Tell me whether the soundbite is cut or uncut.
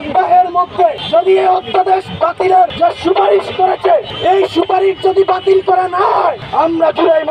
cut